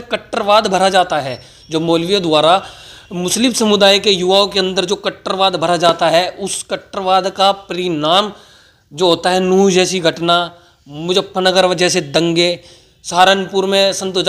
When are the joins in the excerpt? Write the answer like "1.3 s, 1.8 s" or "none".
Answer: none